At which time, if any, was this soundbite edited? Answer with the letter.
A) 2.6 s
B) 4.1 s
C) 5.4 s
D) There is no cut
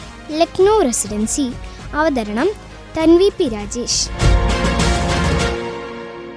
B